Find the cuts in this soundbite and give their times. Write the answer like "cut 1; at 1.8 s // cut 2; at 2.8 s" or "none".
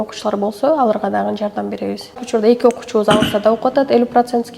cut 1; at 2.2 s